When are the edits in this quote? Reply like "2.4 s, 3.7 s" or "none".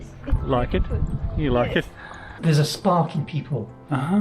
2.3 s